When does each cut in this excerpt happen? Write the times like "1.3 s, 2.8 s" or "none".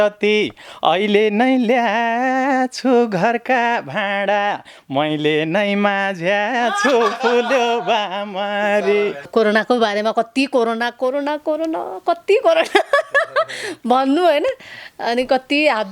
9.3 s